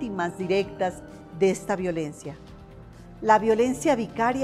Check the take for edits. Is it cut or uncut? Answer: uncut